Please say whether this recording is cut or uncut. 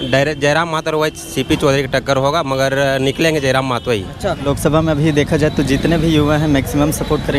cut